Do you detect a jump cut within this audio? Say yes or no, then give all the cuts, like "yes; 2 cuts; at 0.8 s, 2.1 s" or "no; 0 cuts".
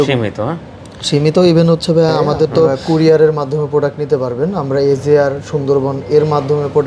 yes; 1 cut; at 2.8 s